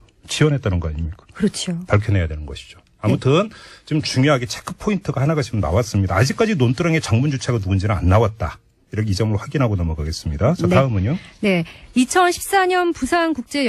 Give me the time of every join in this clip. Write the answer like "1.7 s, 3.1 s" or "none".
8.9 s